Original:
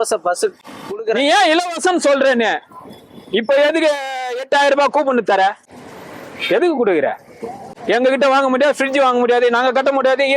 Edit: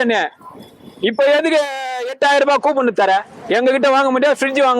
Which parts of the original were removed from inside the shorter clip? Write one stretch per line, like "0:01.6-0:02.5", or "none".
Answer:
0:05.7-0:07.7